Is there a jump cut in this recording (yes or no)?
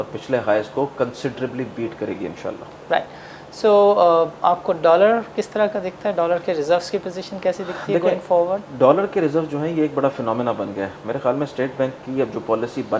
no